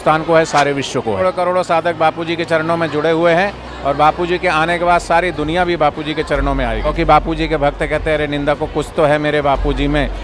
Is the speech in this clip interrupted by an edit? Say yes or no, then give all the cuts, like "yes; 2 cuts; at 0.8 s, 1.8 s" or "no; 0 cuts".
yes; 2 cuts; at 1.2 s, 6.9 s